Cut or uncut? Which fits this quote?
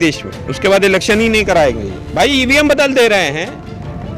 cut